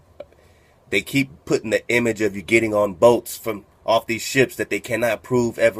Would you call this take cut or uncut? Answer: uncut